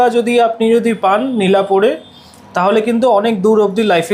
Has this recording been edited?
no; 0 cuts

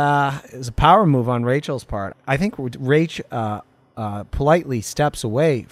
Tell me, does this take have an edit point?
yes; 1 cut; at 2.1 s

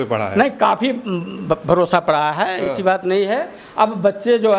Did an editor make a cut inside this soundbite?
no; 0 cuts

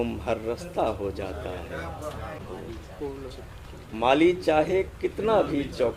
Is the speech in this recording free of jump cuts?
no; 1 cut; at 2.4 s

